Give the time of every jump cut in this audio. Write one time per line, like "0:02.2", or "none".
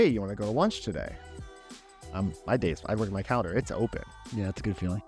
none